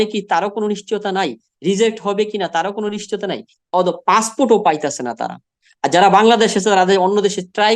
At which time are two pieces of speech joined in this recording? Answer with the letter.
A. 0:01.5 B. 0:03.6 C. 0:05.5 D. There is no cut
D